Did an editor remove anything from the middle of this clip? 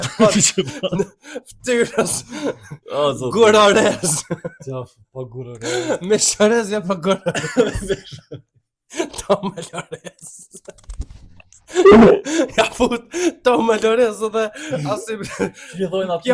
no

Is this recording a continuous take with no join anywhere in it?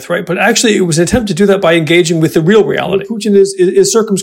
no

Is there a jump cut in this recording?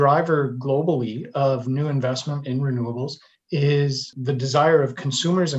yes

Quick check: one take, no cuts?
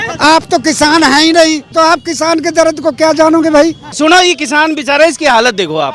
no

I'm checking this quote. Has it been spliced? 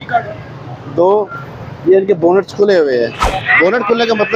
no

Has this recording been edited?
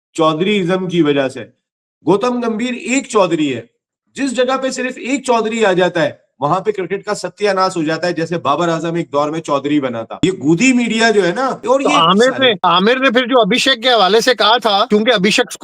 yes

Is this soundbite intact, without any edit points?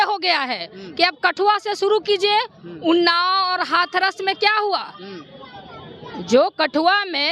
yes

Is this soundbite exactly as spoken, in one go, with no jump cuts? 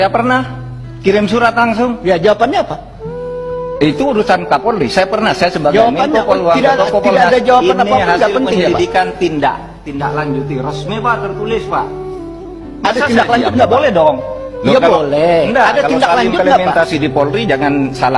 yes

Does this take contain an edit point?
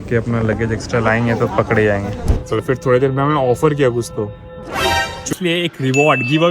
yes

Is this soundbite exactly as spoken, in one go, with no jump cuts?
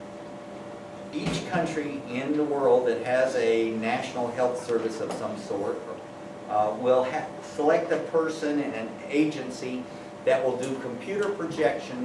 no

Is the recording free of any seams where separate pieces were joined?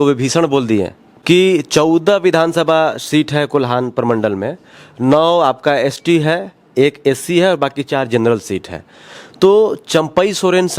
no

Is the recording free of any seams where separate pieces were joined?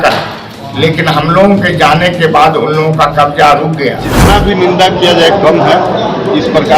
no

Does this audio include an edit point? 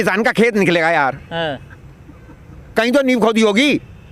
no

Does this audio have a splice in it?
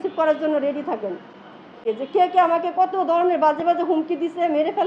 yes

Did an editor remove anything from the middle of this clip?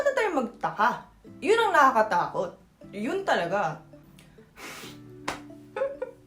yes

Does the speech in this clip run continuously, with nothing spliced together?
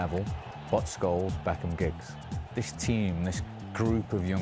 no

